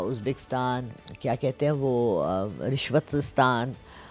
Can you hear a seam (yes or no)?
no